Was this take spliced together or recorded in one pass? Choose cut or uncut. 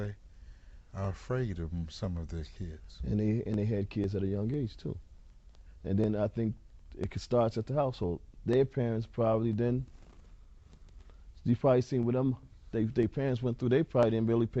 uncut